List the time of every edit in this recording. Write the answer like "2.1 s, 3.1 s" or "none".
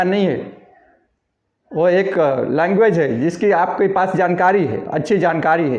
none